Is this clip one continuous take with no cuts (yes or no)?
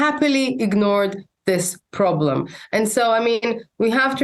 yes